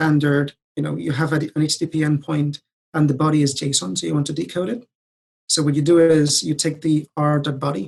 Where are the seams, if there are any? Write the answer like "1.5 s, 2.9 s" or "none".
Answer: none